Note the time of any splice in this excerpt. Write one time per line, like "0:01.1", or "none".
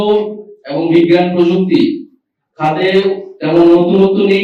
none